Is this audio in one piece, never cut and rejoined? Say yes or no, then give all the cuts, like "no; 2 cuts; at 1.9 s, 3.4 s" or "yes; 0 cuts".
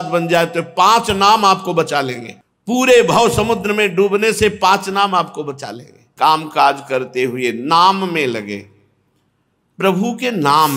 no; 1 cut; at 6.0 s